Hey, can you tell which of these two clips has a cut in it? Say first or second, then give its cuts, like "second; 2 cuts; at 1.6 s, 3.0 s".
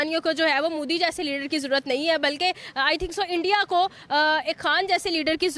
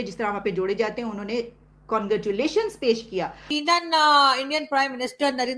second; 1 cut; at 3.5 s